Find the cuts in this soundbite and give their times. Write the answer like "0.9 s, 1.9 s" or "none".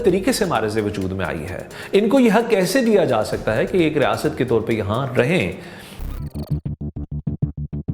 5.9 s